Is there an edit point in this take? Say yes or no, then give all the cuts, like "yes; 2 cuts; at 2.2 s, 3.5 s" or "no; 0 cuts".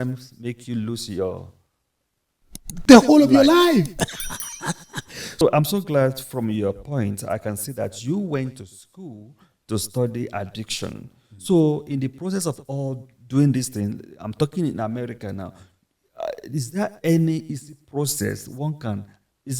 yes; 1 cut; at 5.4 s